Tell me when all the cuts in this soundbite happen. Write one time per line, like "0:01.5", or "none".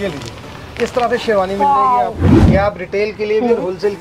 0:02.4